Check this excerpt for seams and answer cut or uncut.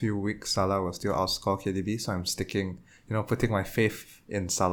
uncut